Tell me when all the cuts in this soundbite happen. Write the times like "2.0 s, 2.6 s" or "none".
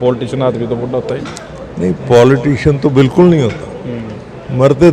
none